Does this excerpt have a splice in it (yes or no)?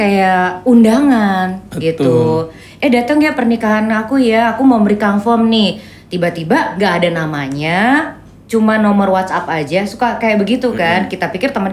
no